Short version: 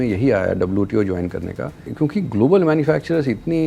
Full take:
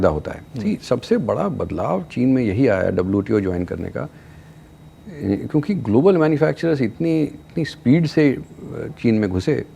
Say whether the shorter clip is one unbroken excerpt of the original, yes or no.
no